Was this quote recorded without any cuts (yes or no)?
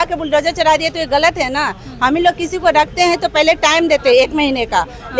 yes